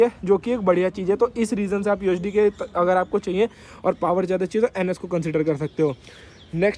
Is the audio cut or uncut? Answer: uncut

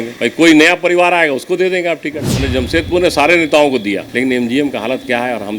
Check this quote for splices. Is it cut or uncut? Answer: cut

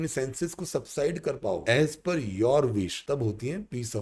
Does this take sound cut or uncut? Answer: cut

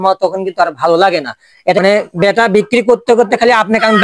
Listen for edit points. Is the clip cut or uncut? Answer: cut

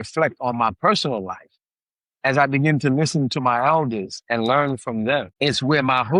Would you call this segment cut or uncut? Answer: cut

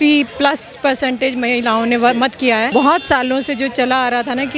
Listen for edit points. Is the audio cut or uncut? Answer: cut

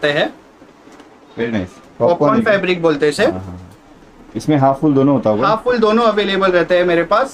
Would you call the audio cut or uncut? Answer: cut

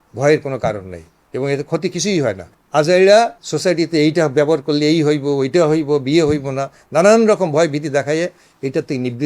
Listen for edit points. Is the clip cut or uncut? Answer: cut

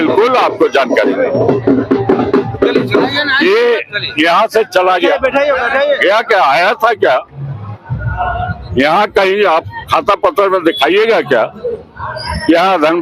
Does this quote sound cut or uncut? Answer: uncut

